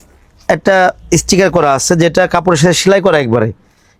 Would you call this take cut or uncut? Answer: uncut